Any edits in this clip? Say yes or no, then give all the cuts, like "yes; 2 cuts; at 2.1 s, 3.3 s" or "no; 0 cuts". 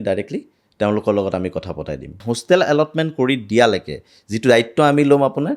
yes; 1 cut; at 2.2 s